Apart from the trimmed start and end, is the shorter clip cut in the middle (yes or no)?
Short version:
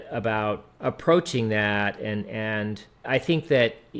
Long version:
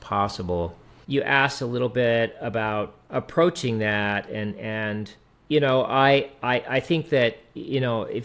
yes